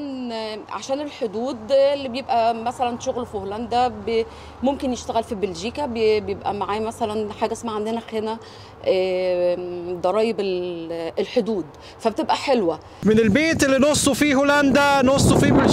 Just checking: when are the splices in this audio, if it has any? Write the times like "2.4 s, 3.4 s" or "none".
none